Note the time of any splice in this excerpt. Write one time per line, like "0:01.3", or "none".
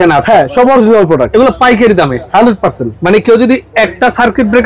none